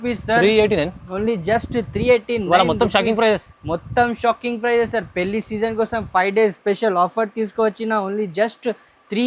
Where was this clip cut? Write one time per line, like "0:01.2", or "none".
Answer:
none